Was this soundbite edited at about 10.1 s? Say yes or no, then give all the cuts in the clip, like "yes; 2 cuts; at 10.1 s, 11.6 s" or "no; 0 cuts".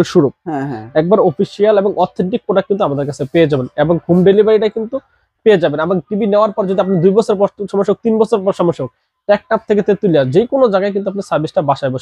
no; 0 cuts